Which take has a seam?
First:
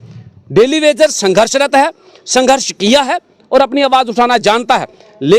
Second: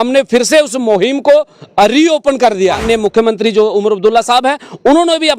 second; 1 cut; at 2.8 s

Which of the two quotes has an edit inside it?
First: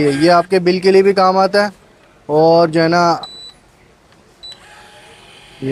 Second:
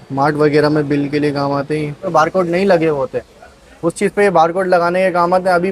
second; 1 cut; at 2.1 s

